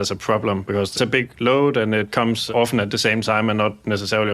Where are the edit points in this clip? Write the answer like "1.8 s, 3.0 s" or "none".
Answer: none